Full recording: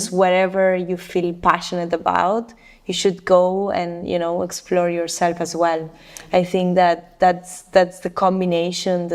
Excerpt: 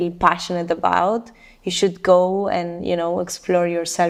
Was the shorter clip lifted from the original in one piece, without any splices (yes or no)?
yes